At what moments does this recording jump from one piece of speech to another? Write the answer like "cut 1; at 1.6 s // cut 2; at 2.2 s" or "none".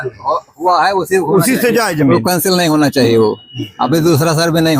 none